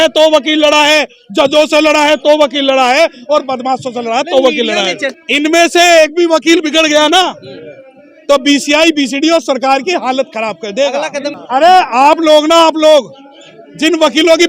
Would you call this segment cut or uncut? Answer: cut